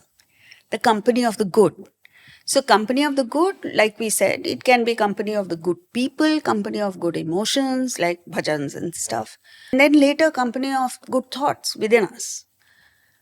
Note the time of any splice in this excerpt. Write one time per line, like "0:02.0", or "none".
0:09.7

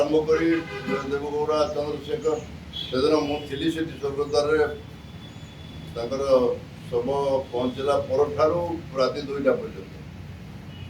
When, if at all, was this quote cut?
none

